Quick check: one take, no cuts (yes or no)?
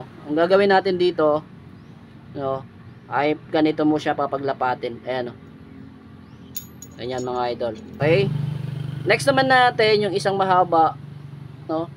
no